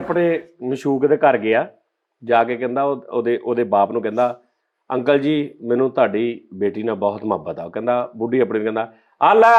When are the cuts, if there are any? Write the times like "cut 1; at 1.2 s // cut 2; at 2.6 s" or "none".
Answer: none